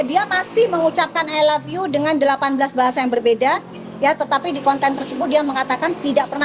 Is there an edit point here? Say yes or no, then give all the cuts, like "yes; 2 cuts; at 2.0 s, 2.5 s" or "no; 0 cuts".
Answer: no; 0 cuts